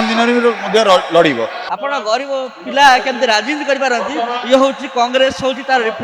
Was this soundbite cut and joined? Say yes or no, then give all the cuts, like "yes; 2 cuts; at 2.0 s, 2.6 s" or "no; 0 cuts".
yes; 1 cut; at 1.6 s